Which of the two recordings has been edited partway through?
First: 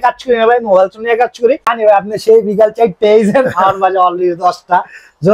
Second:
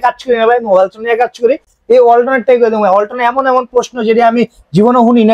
first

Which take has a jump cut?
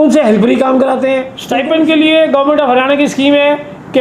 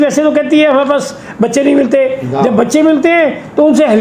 first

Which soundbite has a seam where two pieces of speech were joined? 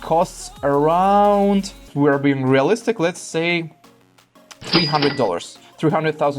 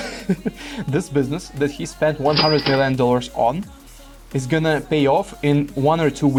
first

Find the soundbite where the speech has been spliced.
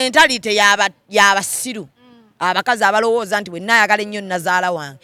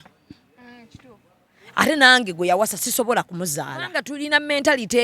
second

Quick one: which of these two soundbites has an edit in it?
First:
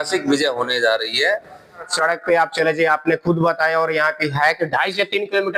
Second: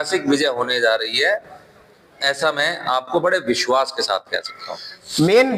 first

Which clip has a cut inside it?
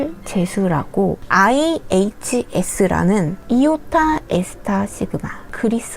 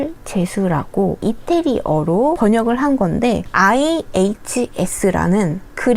first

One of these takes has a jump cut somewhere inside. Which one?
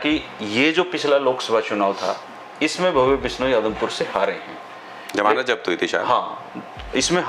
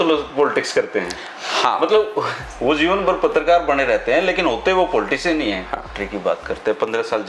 second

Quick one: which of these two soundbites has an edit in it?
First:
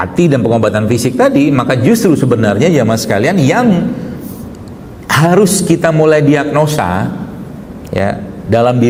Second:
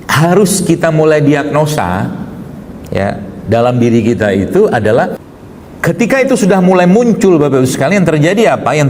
second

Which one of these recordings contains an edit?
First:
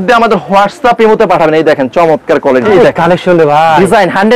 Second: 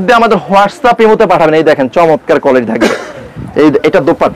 first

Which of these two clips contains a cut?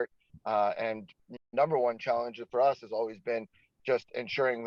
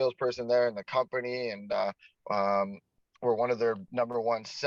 first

